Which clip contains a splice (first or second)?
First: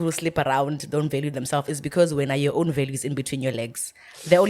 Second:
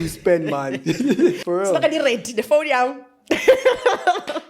second